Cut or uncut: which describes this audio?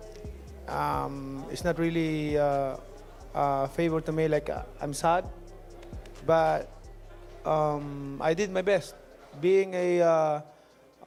uncut